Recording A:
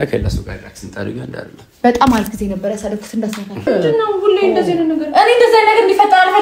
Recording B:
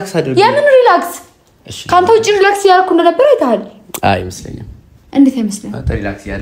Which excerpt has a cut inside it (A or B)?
A